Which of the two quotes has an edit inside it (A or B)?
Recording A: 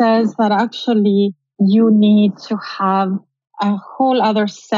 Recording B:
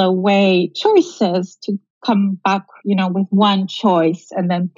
A